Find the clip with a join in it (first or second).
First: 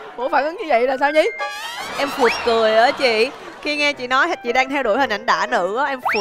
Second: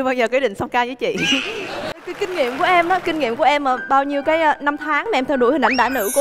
second